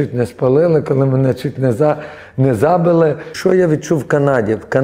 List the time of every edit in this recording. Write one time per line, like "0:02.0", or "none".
0:03.3

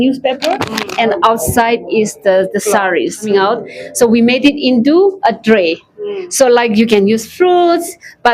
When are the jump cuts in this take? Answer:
0:03.3

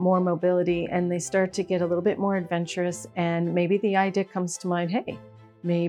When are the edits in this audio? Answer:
none

